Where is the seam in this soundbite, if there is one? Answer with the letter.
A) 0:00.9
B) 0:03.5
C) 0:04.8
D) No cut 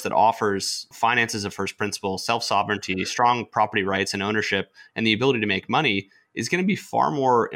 A